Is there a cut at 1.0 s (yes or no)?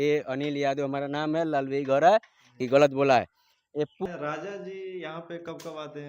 no